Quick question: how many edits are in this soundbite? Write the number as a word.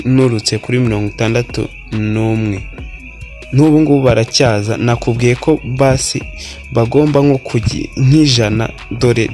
zero